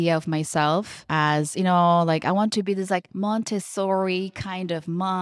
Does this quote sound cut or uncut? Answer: uncut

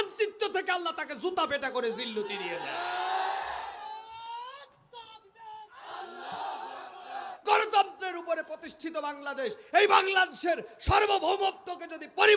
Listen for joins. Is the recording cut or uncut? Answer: cut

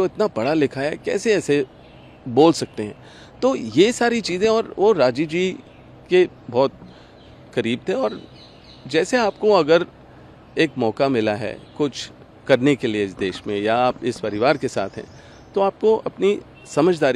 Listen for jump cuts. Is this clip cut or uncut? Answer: uncut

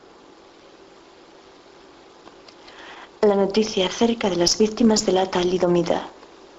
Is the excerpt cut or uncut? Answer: uncut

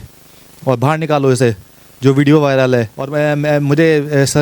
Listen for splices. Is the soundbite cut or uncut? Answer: cut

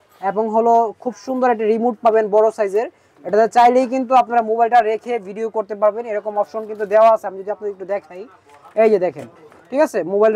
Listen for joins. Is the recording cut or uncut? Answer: uncut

